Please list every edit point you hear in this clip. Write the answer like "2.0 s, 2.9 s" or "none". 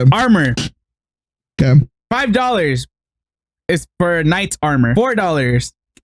4.9 s